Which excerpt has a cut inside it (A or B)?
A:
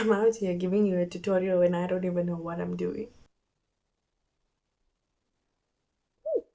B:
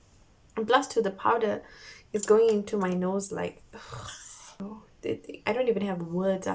B